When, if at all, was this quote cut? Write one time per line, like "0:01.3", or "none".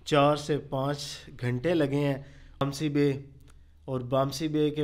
0:02.6